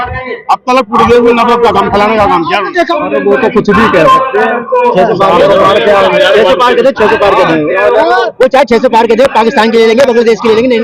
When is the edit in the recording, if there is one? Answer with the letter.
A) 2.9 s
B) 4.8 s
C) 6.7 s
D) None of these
A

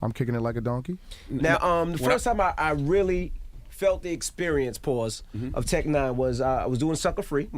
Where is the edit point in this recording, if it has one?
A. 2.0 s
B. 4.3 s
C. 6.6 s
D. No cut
A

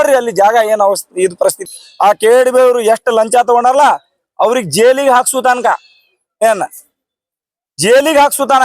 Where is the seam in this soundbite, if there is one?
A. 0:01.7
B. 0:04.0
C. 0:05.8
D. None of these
A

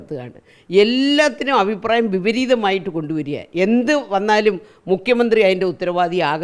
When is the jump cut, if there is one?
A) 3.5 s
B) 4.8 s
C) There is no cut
C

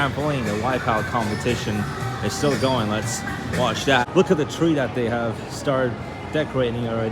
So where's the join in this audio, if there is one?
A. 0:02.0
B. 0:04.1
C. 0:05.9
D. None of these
B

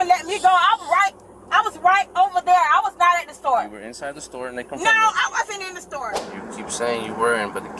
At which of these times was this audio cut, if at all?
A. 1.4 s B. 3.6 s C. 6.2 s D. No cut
C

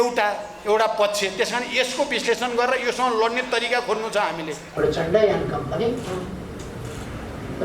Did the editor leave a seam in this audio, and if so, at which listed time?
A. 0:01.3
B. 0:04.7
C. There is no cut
B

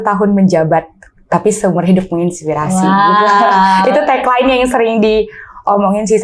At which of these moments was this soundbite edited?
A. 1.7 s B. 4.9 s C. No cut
C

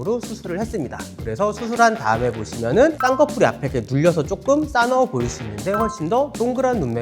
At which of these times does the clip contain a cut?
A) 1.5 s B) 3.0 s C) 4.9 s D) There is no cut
B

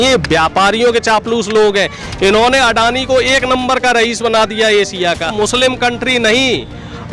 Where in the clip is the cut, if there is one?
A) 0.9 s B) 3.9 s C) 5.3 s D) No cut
C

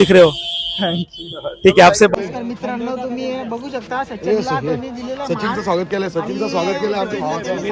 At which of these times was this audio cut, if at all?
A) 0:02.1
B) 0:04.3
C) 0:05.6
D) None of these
A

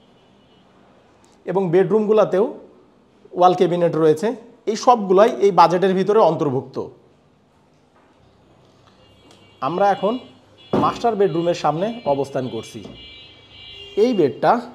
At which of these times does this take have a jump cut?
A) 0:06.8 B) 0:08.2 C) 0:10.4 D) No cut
B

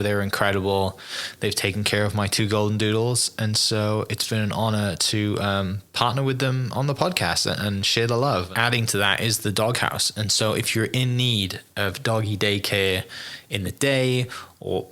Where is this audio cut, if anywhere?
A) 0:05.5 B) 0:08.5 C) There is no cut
B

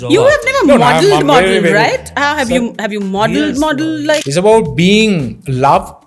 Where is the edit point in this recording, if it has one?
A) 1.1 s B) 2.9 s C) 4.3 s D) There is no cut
C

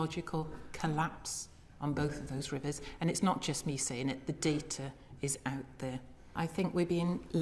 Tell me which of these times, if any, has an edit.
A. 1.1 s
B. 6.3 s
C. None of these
B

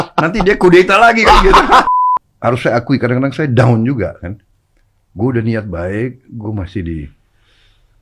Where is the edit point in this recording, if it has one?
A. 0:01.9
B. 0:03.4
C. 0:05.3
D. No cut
A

